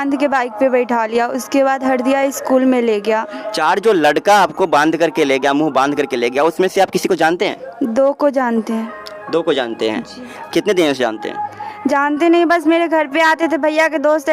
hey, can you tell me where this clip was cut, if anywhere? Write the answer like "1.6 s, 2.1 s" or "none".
none